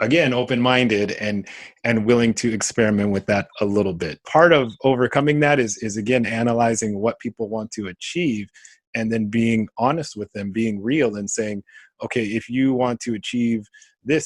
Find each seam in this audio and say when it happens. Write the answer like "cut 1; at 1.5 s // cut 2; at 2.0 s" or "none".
cut 1; at 4.3 s